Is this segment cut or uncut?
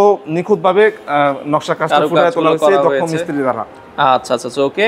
uncut